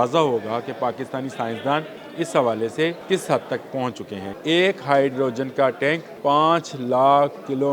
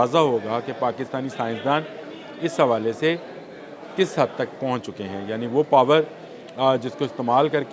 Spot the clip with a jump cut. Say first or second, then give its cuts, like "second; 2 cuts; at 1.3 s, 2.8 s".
first; 4 cuts; at 2.0 s, 3.0 s, 4.2 s, 6.1 s